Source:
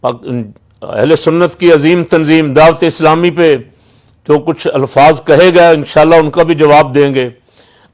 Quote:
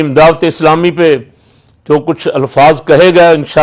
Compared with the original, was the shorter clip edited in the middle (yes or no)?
no